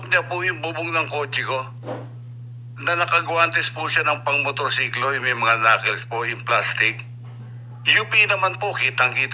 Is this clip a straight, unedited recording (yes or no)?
yes